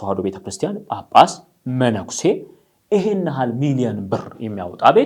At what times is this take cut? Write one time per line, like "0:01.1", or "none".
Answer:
none